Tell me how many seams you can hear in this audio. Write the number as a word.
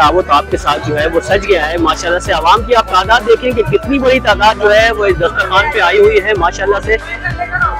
zero